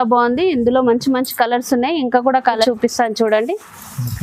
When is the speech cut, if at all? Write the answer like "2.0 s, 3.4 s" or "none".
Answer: 2.6 s